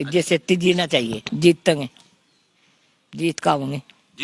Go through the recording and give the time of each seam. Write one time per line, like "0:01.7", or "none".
0:01.2